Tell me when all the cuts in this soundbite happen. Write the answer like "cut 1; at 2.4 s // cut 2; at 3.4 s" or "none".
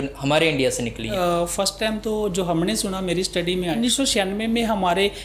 cut 1; at 1.1 s // cut 2; at 3.8 s